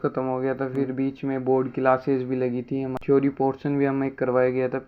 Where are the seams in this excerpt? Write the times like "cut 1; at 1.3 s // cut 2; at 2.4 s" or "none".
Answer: cut 1; at 3.0 s